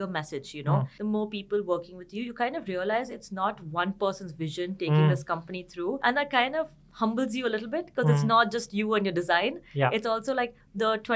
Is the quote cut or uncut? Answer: cut